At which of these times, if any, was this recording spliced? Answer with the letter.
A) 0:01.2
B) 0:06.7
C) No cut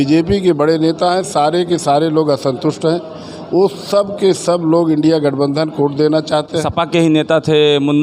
B